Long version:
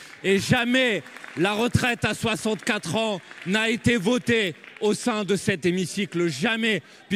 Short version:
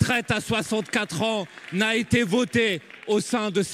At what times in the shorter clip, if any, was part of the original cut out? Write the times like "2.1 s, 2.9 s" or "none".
none